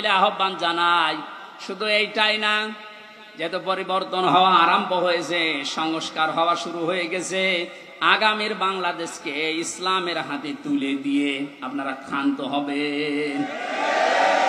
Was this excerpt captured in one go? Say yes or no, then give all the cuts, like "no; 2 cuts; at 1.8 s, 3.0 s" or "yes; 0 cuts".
yes; 0 cuts